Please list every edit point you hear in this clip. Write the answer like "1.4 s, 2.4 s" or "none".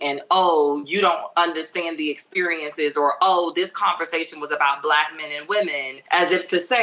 5.9 s